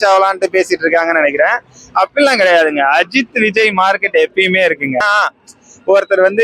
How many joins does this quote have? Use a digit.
1